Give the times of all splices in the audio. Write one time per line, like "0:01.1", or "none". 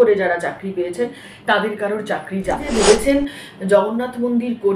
0:02.7